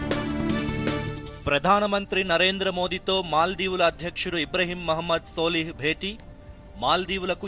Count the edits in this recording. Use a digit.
1